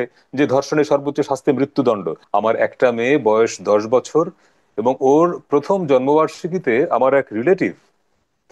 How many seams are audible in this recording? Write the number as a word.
one